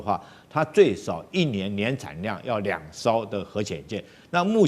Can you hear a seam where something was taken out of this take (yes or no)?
no